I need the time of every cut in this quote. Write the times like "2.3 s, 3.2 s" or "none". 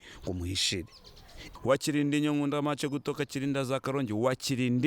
1.4 s